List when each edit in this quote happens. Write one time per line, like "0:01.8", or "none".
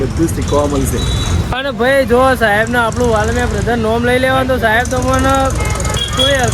none

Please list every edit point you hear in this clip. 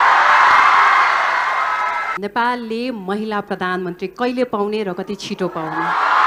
0:02.1

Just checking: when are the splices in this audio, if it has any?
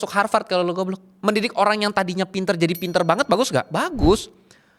0:01.1

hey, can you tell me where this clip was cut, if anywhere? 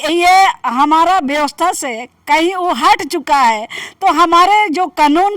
none

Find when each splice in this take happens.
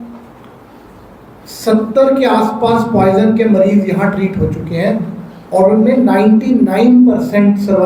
none

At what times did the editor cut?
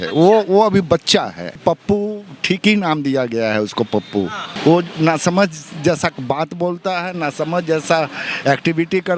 0:01.6
0:04.4

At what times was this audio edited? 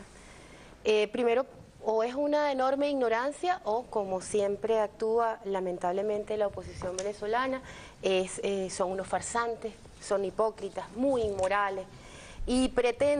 none

